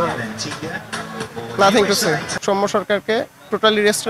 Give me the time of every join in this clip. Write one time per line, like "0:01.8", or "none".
0:02.3